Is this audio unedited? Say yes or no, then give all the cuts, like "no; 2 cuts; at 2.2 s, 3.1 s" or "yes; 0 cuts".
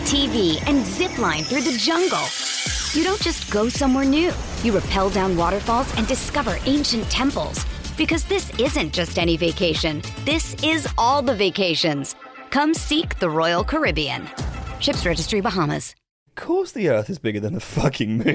no; 1 cut; at 16.3 s